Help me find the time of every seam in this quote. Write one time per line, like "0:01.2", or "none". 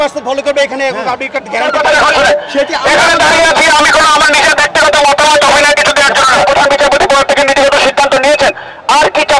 0:01.7
0:06.4